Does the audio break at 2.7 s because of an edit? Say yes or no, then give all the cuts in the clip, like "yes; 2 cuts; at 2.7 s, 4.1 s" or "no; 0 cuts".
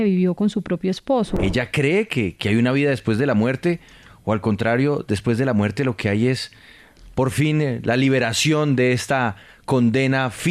no; 1 cut; at 1.3 s